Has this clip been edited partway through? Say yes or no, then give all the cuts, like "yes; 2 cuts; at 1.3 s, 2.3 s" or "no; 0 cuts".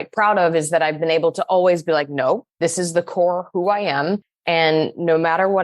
yes; 1 cut; at 2.5 s